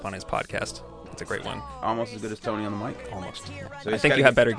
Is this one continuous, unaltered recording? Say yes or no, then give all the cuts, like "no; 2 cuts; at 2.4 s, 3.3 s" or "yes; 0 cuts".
no; 2 cuts; at 1.2 s, 3.5 s